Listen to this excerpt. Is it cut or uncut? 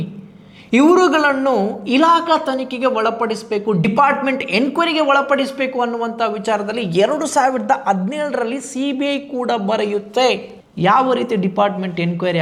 uncut